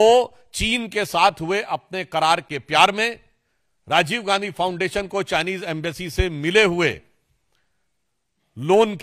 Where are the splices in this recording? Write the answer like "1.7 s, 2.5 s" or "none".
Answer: none